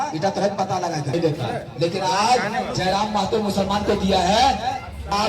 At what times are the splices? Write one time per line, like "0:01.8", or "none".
0:01.1